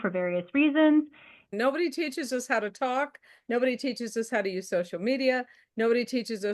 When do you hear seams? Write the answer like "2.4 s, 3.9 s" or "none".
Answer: 1.5 s